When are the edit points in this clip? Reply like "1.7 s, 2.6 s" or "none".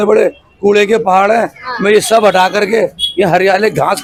none